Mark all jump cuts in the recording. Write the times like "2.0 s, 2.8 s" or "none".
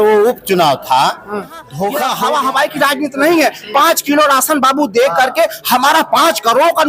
2.1 s